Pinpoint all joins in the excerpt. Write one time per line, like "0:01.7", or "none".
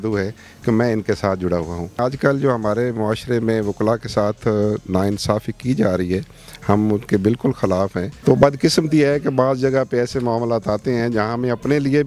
0:02.0
0:08.1